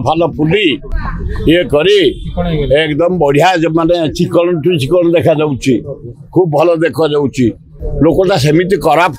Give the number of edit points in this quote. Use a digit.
0